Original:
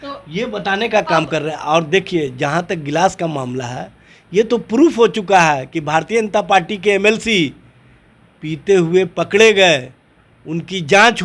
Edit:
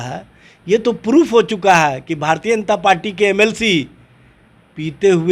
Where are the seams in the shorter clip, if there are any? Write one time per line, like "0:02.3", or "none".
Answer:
none